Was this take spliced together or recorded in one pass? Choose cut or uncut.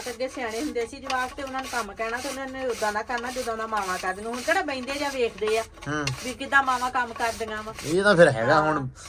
uncut